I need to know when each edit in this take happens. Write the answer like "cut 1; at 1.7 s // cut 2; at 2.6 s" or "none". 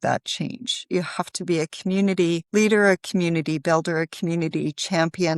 cut 1; at 2.4 s